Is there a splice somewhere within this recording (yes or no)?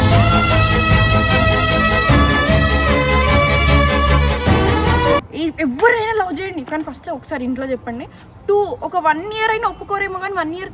yes